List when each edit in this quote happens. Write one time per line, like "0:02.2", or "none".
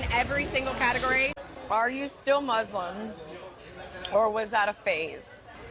0:01.3